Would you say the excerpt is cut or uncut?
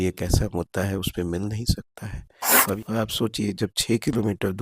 cut